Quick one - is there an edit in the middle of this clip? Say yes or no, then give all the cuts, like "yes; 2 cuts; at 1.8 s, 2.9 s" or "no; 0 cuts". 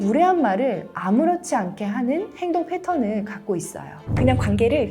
yes; 1 cut; at 4.0 s